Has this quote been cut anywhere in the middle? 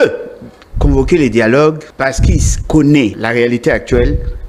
yes; 2 cuts; at 1.9 s, 3.2 s

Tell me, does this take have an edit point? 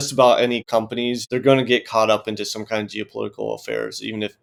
no; 0 cuts

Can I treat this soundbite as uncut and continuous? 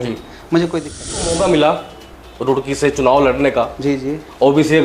no; 1 cut; at 1.3 s

